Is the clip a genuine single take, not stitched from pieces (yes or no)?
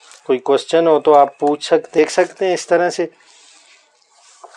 no